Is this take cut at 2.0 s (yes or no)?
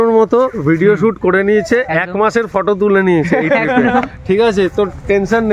yes